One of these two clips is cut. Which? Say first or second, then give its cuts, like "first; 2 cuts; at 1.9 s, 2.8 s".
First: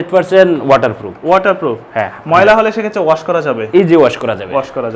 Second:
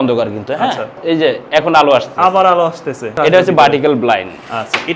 second; 2 cuts; at 1.0 s, 3.1 s